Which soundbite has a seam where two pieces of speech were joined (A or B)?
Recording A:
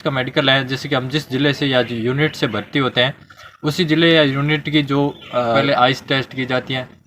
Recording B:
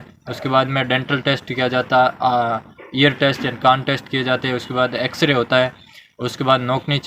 A